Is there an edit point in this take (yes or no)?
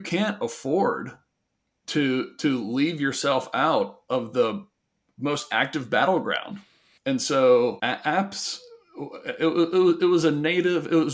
no